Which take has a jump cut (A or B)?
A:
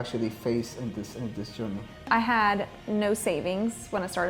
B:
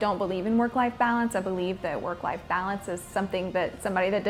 A